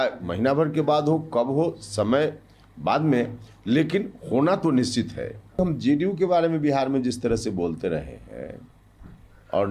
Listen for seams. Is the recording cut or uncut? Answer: uncut